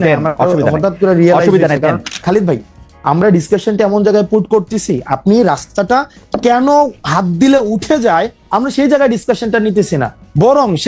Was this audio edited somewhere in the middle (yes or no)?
yes